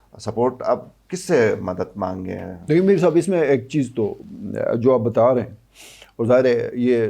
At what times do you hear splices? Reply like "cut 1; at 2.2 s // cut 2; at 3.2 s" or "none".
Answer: none